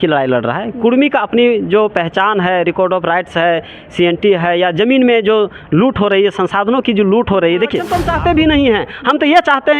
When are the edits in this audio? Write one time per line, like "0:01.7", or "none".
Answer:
0:08.0